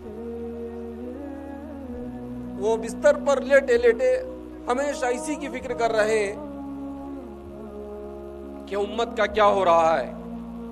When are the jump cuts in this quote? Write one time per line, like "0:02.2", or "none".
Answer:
none

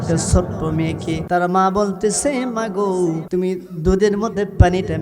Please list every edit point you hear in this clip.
0:01.2
0:03.2

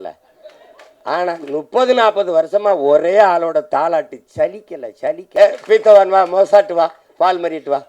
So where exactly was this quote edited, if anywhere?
0:05.2

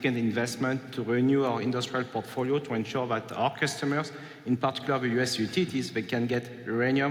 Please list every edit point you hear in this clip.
none

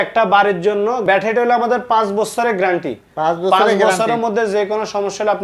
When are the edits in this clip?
0:01.0

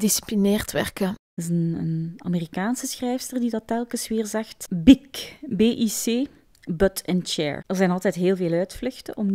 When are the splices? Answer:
0:01.2

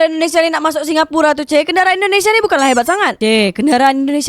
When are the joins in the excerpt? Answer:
0:03.2

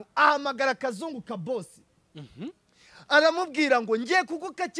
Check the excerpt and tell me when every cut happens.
none

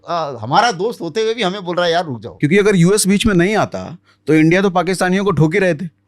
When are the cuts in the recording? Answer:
0:02.2

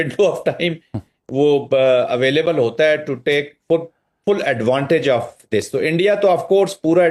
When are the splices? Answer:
none

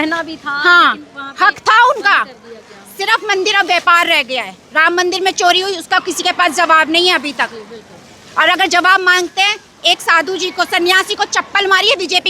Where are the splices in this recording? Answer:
none

